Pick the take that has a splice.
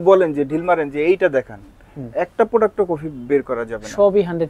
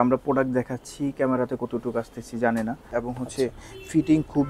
second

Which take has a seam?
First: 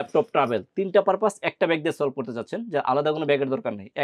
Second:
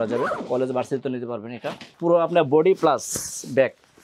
second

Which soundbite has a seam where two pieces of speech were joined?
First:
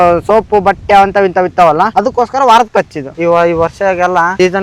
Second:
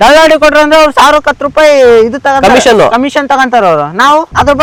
first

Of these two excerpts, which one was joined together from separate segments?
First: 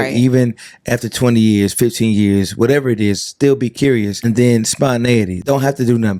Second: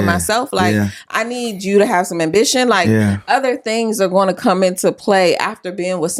first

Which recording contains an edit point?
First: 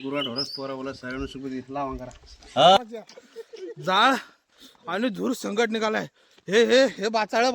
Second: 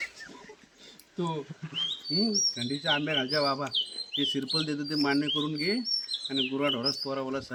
first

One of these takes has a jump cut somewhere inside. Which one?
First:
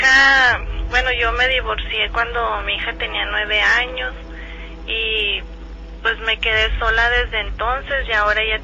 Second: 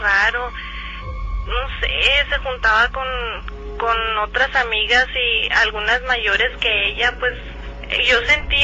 second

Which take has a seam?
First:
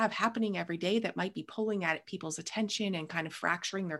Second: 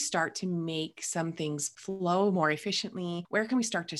second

